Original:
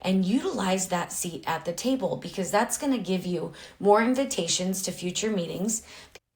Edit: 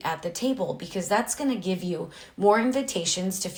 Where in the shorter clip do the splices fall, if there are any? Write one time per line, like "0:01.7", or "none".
none